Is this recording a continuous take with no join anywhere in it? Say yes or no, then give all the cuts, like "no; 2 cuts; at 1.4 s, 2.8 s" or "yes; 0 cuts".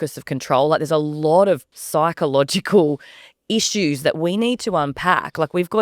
no; 1 cut; at 1.7 s